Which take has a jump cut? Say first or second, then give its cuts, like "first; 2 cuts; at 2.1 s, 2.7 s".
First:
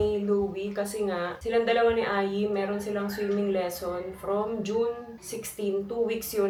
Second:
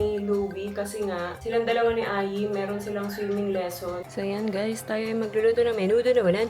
second; 1 cut; at 4.0 s